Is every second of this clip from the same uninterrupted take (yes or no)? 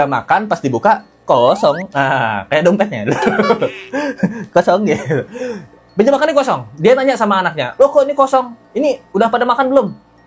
yes